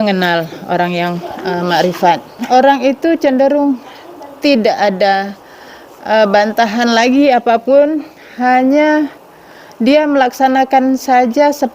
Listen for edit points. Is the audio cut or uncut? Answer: cut